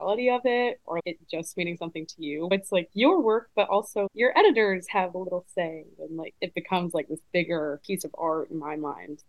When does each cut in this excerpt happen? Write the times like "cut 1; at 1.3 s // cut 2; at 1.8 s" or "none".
cut 1; at 6.3 s // cut 2; at 7.8 s